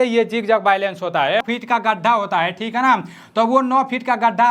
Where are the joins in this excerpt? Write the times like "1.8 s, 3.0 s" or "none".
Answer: 1.5 s